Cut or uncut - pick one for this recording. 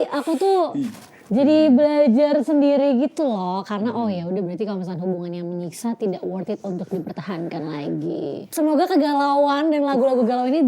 cut